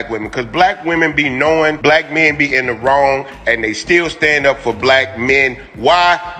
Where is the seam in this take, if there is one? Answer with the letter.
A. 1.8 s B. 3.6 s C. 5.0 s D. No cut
A